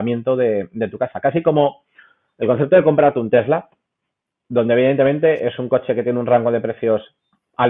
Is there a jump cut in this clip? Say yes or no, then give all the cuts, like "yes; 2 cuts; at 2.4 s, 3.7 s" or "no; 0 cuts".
no; 0 cuts